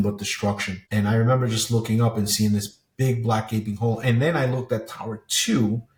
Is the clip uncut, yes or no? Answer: yes